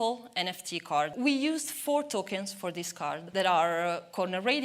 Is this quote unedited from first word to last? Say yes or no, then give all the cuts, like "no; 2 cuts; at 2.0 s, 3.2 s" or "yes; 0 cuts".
no; 2 cuts; at 1.1 s, 3.2 s